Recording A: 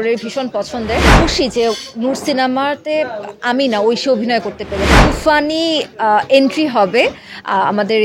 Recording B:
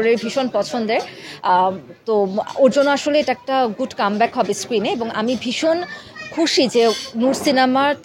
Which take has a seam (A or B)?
A